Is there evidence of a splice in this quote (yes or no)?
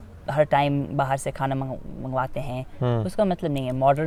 no